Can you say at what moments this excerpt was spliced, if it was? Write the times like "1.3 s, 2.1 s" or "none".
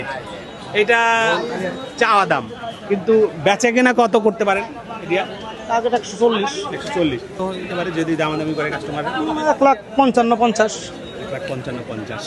7.4 s

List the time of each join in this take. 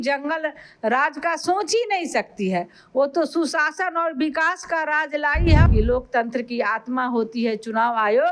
5.7 s

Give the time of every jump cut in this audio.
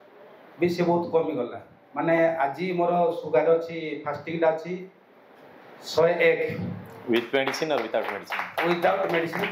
none

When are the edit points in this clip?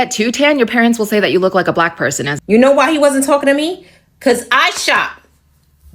2.3 s

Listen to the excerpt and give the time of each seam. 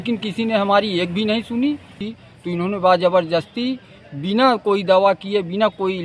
2.1 s

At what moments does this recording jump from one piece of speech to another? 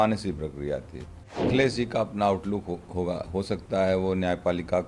1.5 s

